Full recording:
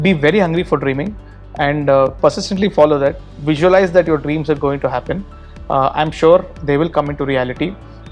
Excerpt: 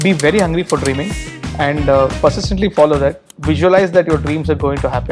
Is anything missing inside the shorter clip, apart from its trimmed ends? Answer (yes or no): no